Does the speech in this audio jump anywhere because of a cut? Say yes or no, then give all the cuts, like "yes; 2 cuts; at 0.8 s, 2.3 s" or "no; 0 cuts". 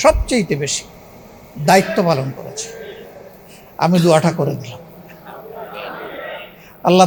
no; 0 cuts